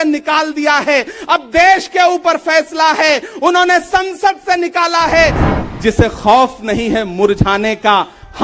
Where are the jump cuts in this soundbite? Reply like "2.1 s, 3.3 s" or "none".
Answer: 5.4 s